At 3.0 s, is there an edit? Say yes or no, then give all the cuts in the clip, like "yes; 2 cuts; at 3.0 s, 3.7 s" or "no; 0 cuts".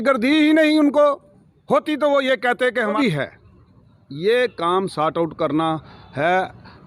yes; 1 cut; at 3.0 s